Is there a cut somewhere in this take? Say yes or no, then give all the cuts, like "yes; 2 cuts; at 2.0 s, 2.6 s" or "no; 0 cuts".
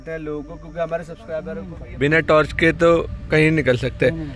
yes; 1 cut; at 1.1 s